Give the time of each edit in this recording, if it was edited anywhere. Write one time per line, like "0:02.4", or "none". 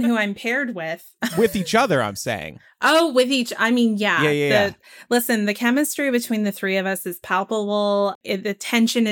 0:01.3
0:08.2